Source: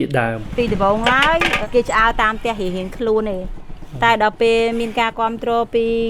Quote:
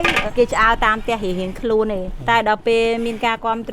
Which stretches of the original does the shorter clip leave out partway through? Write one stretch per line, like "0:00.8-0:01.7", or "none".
0:03.5-0:03.9